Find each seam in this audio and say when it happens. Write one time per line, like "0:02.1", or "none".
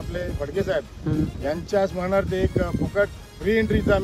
none